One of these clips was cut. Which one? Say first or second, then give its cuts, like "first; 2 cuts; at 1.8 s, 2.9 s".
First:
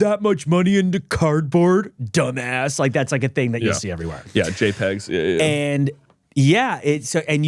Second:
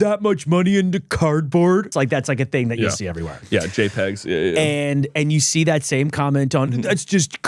second; 2 cuts; at 1.9 s, 5.1 s